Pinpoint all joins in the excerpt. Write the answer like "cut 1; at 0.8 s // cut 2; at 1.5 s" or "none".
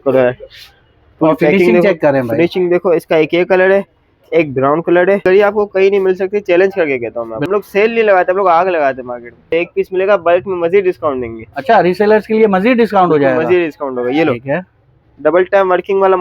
cut 1; at 5.2 s // cut 2; at 7.4 s // cut 3; at 9.4 s